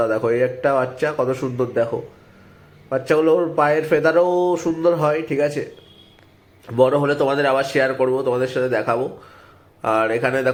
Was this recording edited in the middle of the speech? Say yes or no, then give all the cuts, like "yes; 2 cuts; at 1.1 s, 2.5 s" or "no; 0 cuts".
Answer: no; 0 cuts